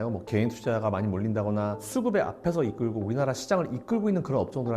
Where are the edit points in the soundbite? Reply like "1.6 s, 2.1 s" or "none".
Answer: 1.8 s